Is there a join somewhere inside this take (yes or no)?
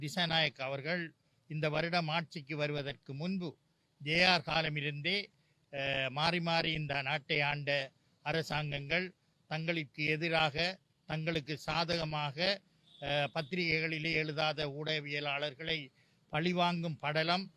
no